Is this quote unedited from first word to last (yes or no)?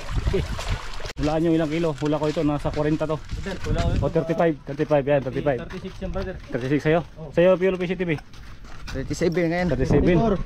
no